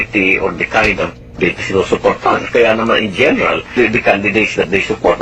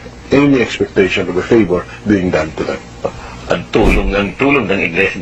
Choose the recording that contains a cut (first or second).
first